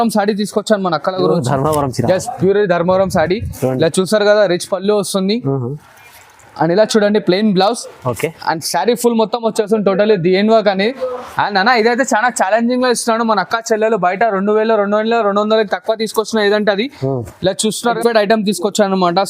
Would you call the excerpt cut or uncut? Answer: cut